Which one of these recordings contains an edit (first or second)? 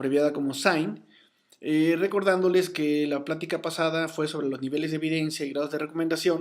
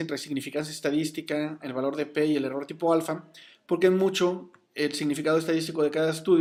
first